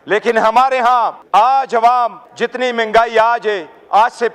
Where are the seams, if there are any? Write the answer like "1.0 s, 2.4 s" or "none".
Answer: 1.2 s, 2.2 s

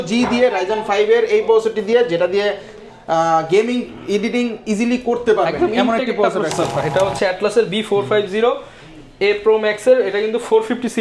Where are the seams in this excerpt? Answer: 6.8 s

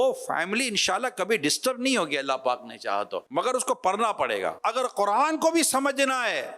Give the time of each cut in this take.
3.2 s, 4.6 s

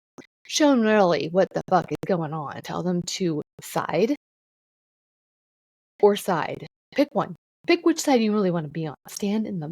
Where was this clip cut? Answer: 2.6 s, 3.6 s, 6.7 s, 7.5 s

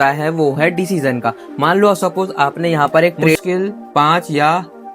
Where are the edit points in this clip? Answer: 3.4 s

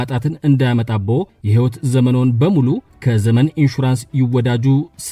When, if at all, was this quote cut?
1.4 s, 2.9 s

